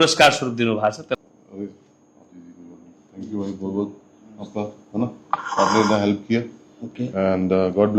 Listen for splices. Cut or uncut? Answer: cut